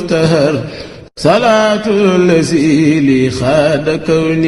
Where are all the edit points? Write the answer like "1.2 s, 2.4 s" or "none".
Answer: none